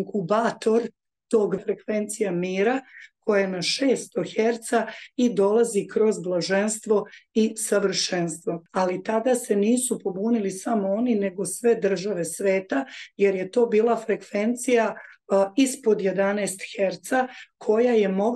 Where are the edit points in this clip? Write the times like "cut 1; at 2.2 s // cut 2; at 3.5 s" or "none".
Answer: cut 1; at 1.6 s // cut 2; at 8.6 s